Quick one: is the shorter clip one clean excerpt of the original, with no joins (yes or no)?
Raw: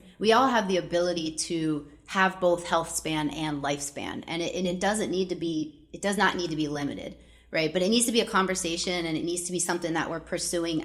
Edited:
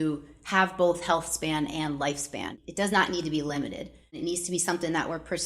no